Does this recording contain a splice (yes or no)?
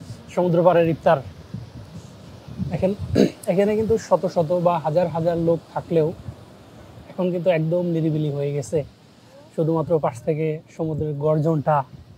no